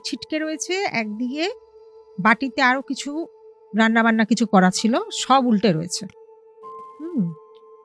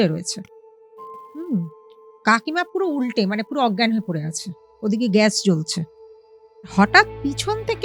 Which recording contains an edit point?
second; 1 cut; at 6.7 s

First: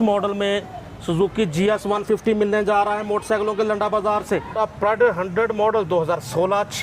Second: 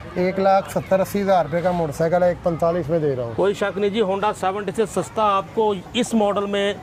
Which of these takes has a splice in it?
first; 1 cut; at 4.5 s

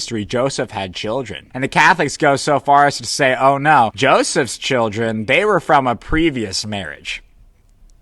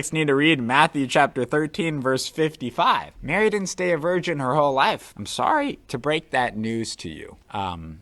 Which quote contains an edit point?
first; 1 cut; at 1.5 s

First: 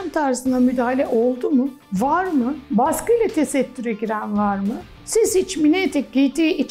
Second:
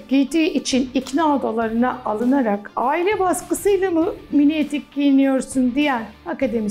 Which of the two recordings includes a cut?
first; 2 cuts; at 2.6 s, 4.9 s

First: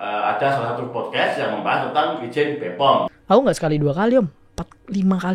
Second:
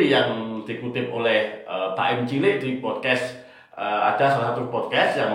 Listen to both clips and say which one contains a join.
first; 1 cut; at 3.1 s

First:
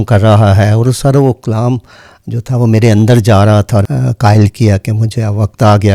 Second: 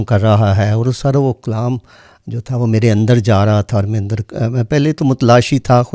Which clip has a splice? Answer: first; 1 cut; at 3.9 s

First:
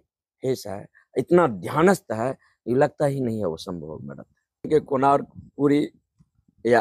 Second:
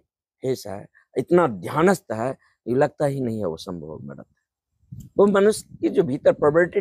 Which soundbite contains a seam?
first; 1 cut; at 4.7 s

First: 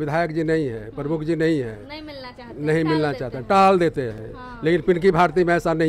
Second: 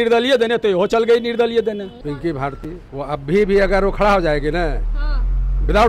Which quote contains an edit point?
second; 2 cuts; at 2.0 s, 2.8 s

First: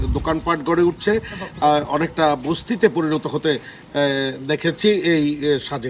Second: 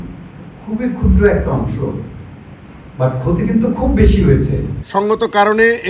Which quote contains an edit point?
second; 1 cut; at 4.7 s

